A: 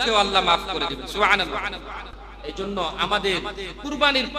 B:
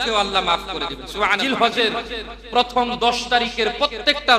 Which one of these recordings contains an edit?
B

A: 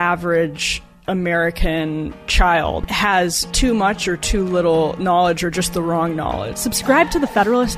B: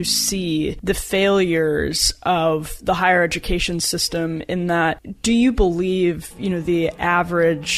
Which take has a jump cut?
A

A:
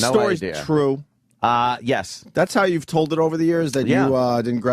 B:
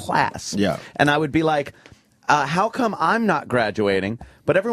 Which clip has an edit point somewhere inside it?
A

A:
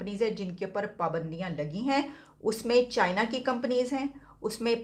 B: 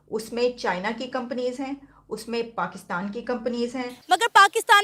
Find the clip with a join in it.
B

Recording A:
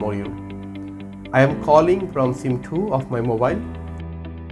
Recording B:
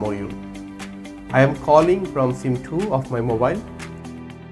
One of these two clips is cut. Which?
A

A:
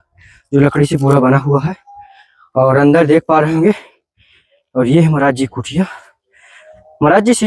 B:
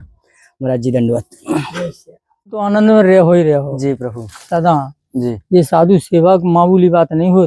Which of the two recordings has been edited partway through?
B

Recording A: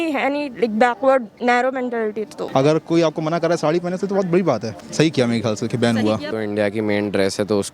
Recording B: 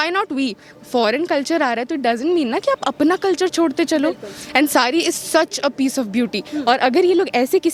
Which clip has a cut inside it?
A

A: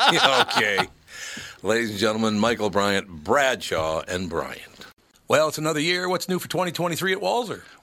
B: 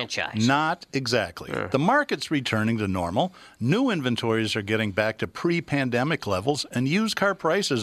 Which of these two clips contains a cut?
A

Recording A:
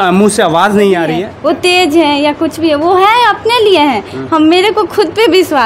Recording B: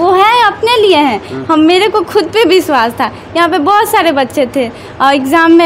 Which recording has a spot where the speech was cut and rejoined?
A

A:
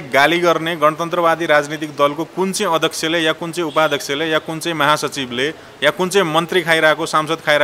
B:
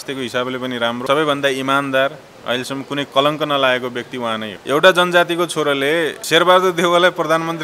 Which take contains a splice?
B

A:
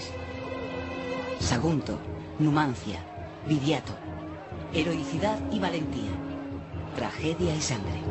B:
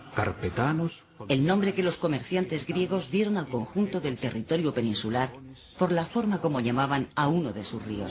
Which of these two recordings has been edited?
A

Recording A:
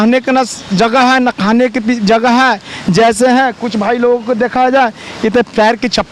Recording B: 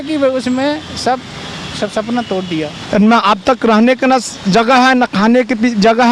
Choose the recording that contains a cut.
B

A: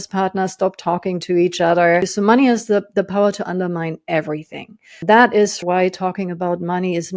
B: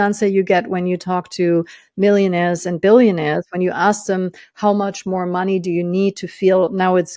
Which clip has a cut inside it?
A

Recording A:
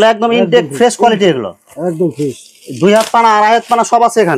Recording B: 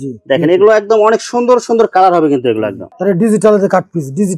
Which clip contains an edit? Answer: B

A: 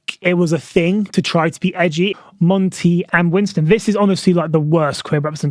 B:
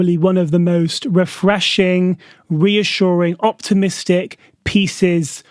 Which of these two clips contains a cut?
A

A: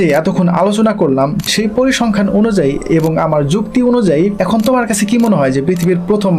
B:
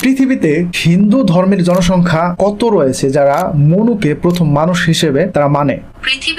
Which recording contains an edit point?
A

